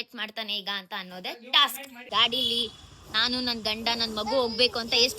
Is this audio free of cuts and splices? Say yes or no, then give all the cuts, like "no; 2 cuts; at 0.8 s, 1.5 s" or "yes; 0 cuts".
no; 1 cut; at 2.0 s